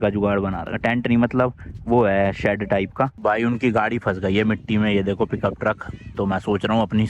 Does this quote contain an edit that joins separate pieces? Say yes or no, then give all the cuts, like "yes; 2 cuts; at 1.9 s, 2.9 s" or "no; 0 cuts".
yes; 1 cut; at 3.1 s